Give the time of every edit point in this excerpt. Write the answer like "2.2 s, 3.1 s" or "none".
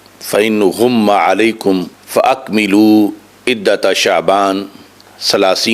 2.0 s